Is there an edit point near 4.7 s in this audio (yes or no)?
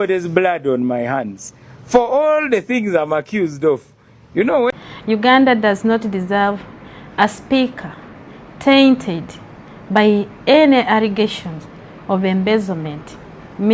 yes